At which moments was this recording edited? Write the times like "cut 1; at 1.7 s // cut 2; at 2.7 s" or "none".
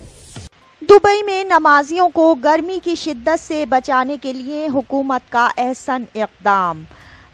none